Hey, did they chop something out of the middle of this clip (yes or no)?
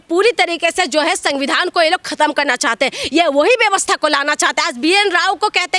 no